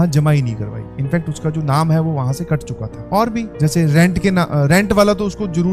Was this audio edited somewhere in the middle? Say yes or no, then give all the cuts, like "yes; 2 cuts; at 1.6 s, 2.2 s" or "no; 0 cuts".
no; 0 cuts